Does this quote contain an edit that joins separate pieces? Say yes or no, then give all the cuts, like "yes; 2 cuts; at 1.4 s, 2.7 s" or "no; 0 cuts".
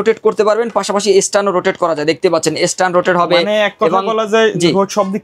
no; 0 cuts